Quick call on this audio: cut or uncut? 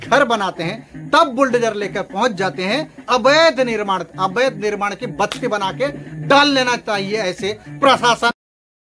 uncut